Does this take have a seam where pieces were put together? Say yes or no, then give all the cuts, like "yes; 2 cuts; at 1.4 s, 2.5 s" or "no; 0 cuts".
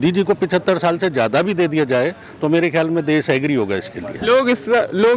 no; 0 cuts